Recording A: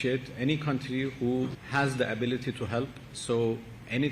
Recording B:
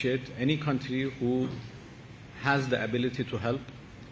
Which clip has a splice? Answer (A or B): A